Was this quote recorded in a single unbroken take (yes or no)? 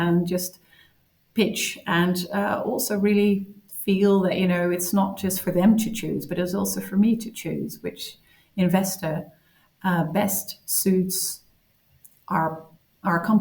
yes